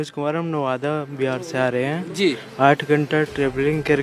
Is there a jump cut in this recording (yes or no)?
no